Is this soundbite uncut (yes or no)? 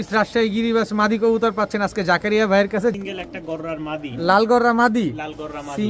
no